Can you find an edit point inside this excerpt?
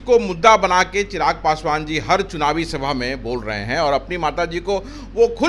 no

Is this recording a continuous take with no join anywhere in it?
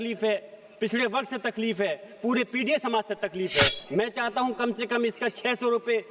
no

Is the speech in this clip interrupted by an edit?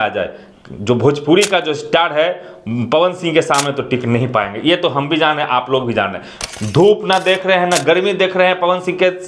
yes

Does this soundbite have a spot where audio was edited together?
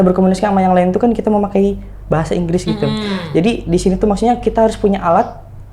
no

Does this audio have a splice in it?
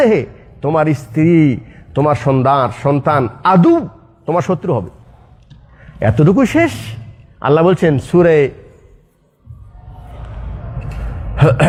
no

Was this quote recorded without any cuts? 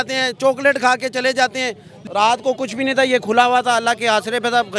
no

